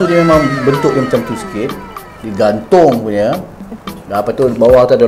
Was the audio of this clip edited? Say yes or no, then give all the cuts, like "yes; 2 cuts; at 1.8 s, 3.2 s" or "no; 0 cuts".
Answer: no; 0 cuts